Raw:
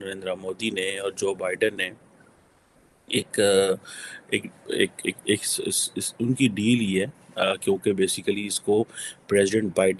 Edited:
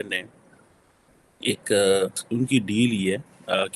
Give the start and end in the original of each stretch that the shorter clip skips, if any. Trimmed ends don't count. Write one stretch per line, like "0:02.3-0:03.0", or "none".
0:03.9-0:06.1

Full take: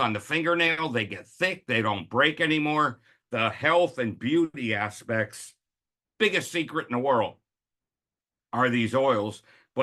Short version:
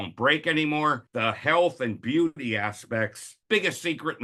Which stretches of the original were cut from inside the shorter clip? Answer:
0:03.0-0:03.2
0:05.5-0:06.0

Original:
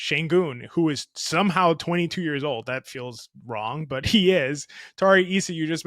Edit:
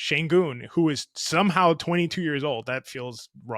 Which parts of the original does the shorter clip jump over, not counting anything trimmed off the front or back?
none

